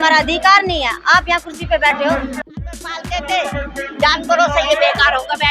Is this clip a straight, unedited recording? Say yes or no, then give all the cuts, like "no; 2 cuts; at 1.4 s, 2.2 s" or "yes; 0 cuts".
no; 1 cut; at 2.5 s